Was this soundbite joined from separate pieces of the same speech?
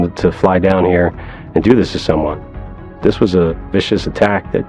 no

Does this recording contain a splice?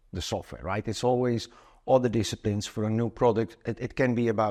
no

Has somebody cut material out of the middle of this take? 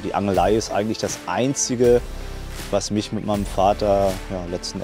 no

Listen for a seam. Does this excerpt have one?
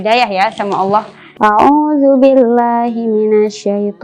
yes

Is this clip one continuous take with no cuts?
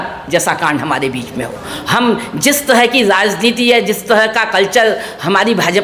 yes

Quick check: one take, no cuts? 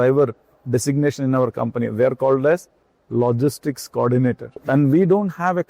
no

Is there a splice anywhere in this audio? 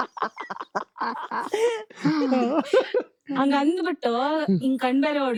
no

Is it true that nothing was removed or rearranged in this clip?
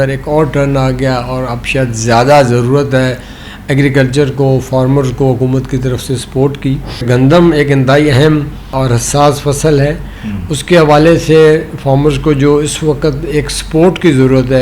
no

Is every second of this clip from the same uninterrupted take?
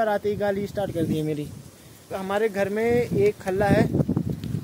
no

